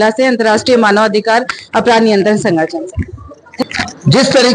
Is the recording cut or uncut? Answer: uncut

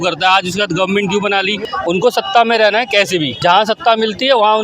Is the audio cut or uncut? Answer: cut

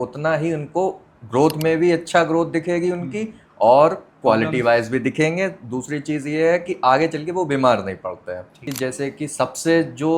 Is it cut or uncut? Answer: cut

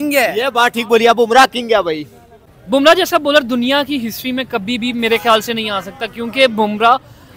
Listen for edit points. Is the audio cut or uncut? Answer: cut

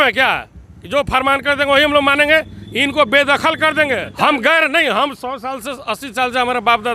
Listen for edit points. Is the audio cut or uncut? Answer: cut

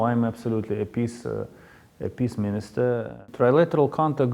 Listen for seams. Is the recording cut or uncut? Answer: cut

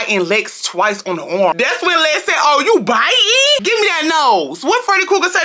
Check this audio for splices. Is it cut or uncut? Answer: cut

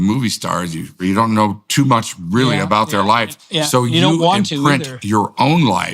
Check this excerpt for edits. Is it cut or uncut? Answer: cut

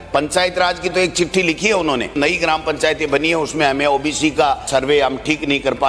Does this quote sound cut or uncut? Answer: cut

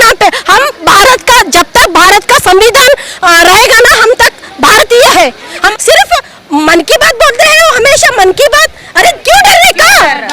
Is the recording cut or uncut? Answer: cut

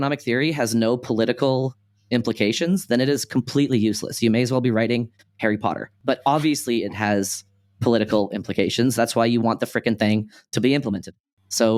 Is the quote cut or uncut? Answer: uncut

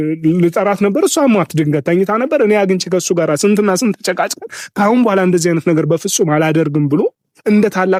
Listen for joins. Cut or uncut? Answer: uncut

